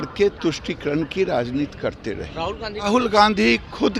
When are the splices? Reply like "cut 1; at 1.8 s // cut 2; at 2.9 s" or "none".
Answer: cut 1; at 2.9 s